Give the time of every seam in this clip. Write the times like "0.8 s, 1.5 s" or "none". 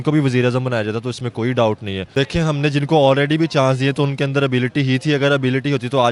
2.0 s